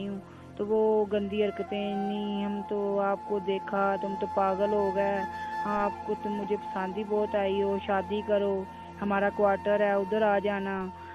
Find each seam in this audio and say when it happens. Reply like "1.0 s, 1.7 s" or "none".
none